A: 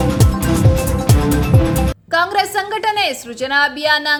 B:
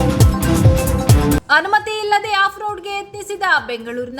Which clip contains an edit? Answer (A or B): B